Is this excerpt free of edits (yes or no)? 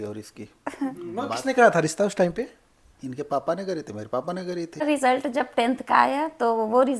no